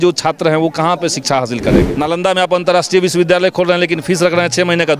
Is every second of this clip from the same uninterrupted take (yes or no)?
no